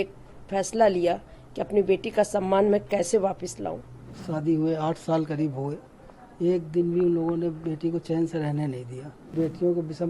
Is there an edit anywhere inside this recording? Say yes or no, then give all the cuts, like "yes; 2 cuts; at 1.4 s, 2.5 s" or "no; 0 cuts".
yes; 2 cuts; at 4.1 s, 9.3 s